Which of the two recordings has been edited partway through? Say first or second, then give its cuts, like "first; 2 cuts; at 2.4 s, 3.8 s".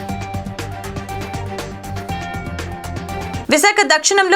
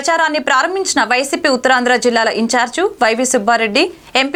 first; 1 cut; at 3.4 s